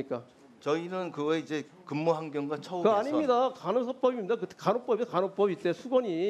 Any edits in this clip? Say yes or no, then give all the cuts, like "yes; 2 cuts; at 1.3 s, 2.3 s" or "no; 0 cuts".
no; 0 cuts